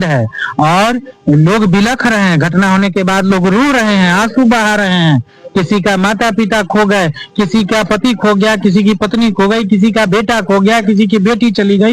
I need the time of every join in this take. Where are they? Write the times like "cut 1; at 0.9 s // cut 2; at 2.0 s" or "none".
none